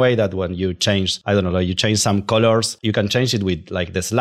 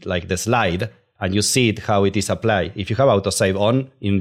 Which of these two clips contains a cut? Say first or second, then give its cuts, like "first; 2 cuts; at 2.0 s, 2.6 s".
first; 2 cuts; at 1.2 s, 2.7 s